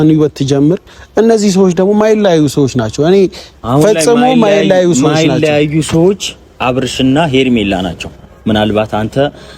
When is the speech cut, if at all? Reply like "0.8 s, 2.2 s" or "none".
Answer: none